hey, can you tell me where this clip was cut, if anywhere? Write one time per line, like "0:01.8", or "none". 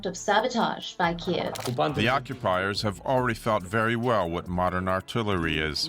0:01.6